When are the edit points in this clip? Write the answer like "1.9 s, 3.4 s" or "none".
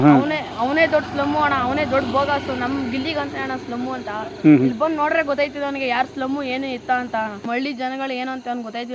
7.4 s